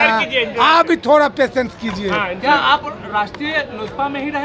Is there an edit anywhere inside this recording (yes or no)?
no